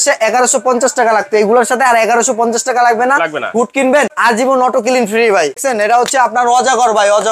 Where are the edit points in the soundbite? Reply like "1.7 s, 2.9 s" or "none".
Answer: 4.2 s, 5.6 s